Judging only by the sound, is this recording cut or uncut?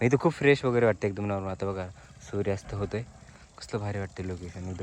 uncut